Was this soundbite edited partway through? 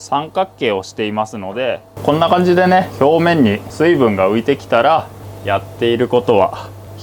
yes; 2 cuts; at 1.9 s, 5.2 s

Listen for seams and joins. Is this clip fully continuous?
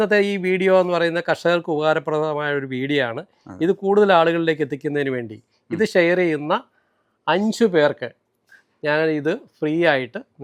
yes; 0 cuts

